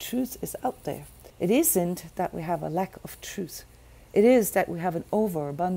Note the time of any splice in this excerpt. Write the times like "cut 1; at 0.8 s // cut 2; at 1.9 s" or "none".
cut 1; at 1.3 s